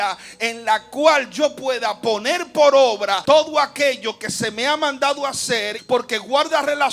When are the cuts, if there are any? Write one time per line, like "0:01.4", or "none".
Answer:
0:03.2
0:05.7